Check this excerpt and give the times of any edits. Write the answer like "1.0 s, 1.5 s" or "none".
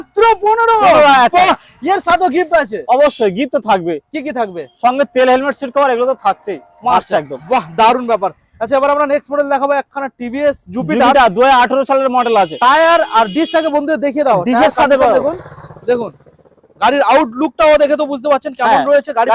none